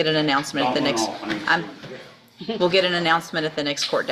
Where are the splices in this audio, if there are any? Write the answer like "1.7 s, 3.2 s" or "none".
none